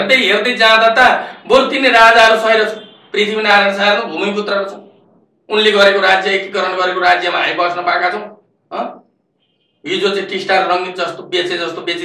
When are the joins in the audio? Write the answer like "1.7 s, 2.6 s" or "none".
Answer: none